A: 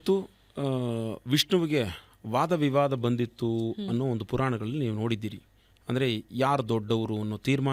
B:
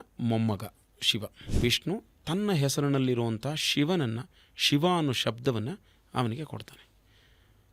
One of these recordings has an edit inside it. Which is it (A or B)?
B